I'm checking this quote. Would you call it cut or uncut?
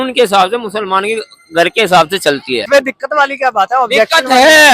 cut